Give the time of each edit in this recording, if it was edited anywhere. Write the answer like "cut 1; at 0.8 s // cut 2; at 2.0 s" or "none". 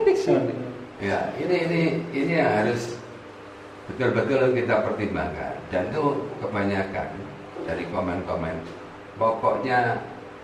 none

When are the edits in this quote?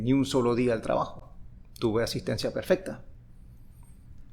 none

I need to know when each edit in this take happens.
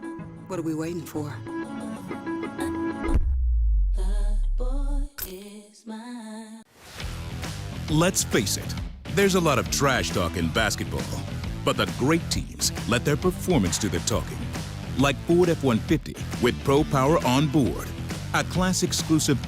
cut 1; at 6.7 s

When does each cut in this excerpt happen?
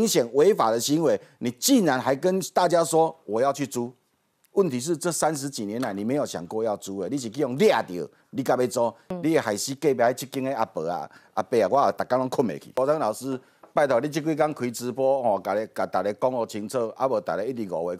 cut 1; at 9.1 s // cut 2; at 12.7 s

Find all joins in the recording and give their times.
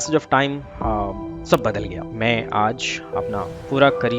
cut 1; at 2.0 s

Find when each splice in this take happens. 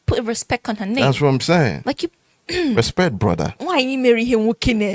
cut 1; at 3.5 s

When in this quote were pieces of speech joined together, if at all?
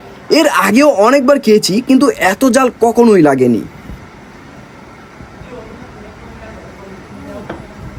none

